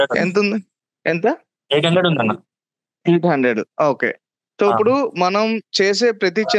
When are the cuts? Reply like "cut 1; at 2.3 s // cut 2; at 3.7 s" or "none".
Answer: none